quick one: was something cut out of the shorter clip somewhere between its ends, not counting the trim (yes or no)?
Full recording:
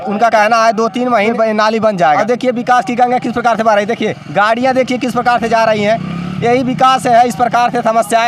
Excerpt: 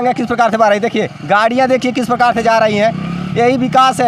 no